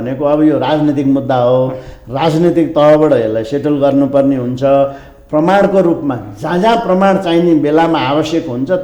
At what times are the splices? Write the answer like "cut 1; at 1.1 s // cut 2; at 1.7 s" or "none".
none